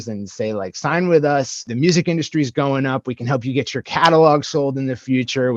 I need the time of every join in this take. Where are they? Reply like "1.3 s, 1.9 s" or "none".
1.6 s